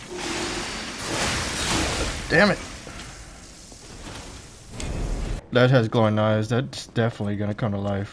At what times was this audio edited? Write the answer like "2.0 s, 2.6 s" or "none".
5.4 s